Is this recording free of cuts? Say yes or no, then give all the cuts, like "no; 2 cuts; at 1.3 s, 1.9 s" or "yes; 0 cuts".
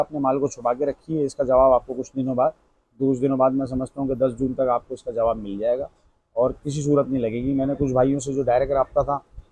yes; 0 cuts